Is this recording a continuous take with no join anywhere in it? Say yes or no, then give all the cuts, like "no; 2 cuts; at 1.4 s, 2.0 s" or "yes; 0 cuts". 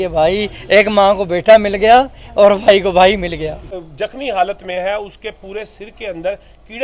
no; 1 cut; at 3.7 s